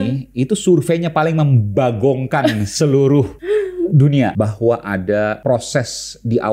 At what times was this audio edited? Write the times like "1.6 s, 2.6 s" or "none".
3.4 s, 4.3 s, 5.4 s